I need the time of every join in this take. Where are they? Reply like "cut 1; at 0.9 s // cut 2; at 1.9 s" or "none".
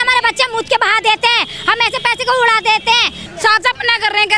cut 1; at 3.2 s